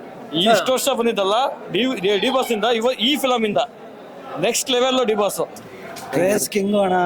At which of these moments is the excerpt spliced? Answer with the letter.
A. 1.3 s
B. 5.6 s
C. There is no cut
B